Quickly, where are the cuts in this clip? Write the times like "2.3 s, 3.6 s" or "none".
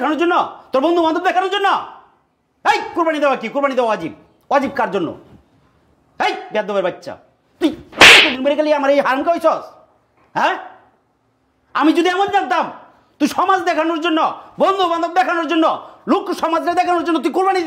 none